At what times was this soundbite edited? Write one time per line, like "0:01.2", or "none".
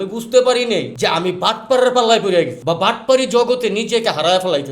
0:00.9
0:02.6